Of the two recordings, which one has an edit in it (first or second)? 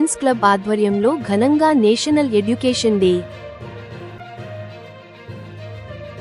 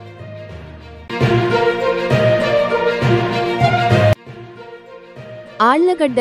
second